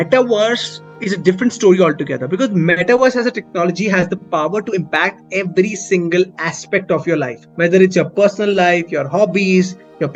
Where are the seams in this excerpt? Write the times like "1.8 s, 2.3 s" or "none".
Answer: none